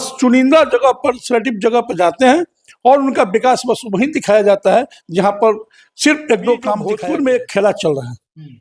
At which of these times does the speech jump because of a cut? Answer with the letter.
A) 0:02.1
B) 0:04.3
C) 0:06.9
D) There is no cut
C